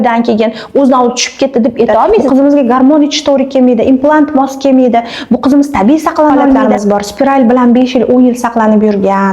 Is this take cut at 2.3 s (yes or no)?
yes